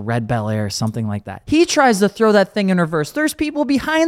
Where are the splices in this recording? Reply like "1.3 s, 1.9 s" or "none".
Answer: 1.4 s